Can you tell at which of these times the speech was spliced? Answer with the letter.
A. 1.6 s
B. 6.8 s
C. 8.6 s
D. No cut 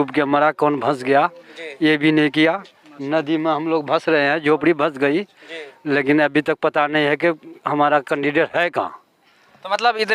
D